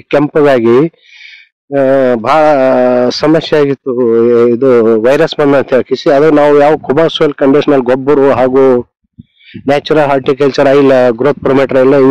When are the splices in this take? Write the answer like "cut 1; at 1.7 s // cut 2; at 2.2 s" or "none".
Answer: none